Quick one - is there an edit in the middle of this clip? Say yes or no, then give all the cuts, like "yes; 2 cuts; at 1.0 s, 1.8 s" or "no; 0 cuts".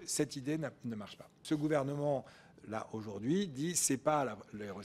yes; 1 cut; at 1.4 s